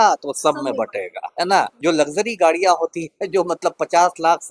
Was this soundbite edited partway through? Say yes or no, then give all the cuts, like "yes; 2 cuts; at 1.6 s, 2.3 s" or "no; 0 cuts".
yes; 1 cut; at 1.7 s